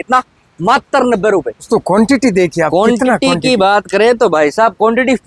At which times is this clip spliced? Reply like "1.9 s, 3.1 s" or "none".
1.7 s